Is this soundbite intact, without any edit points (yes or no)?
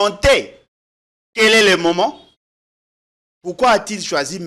no